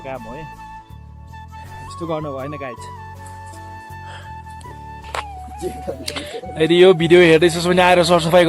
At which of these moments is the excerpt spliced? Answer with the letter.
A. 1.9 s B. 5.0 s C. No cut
B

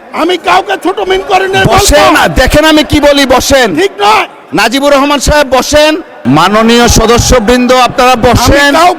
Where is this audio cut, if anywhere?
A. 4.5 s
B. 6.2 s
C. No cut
B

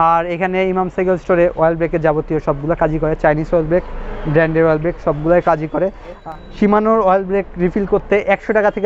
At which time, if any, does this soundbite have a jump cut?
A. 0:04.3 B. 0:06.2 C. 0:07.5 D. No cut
B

